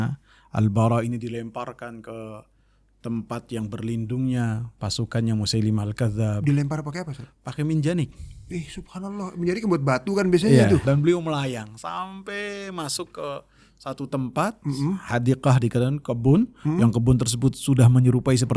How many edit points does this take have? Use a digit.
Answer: 1